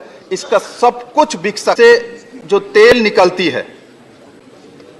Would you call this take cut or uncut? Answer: cut